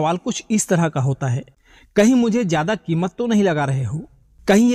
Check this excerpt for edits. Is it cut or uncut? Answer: uncut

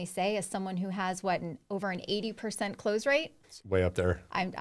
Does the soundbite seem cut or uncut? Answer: uncut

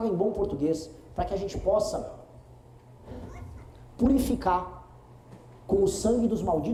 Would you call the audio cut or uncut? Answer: uncut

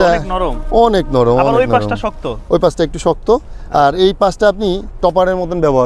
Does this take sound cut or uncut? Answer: uncut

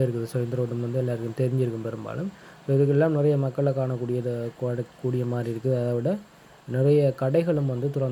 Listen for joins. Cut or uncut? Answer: uncut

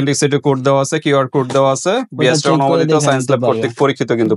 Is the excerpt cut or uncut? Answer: uncut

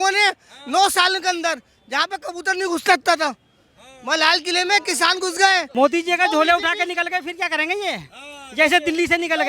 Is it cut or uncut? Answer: cut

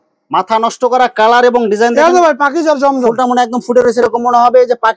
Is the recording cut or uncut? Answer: uncut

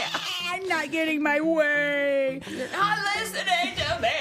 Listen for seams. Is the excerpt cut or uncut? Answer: uncut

